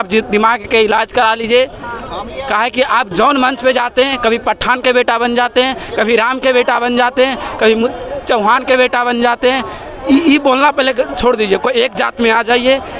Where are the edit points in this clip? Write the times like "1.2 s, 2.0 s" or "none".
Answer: none